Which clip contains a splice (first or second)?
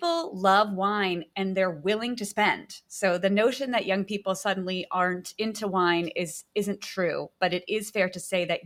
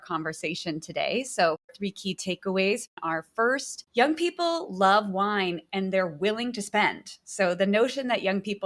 second